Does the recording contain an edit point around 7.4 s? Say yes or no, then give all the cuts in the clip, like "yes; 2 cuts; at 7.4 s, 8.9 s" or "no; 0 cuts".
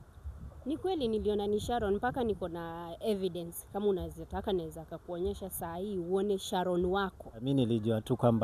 yes; 1 cut; at 7.4 s